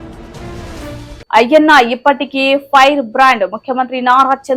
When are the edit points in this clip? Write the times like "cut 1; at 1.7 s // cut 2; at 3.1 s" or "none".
cut 1; at 1.2 s